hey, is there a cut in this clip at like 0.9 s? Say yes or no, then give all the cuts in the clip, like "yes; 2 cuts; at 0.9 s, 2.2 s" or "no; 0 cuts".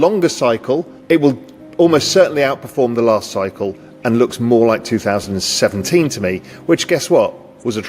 yes; 1 cut; at 0.9 s